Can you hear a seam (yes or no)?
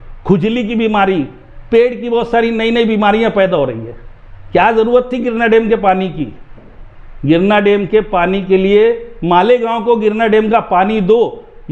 no